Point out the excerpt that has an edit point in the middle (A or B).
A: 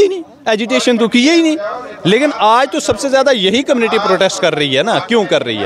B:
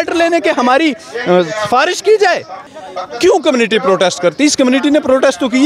B